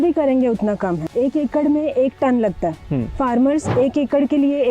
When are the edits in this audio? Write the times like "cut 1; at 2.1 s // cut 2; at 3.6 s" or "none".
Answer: cut 1; at 1.0 s